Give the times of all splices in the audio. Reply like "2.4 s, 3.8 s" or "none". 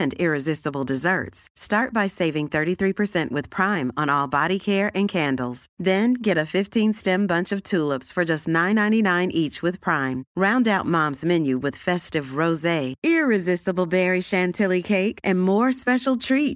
none